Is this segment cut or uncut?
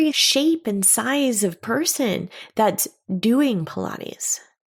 uncut